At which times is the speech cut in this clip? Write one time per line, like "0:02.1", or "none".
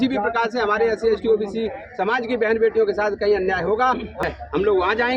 0:04.2